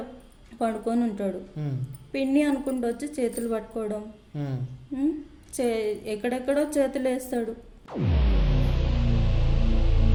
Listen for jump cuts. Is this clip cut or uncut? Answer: uncut